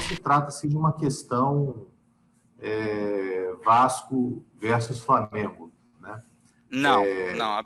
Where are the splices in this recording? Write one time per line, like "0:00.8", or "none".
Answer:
none